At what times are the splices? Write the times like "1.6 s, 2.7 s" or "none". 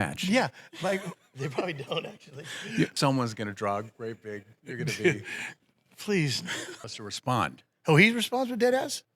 2.9 s, 6.8 s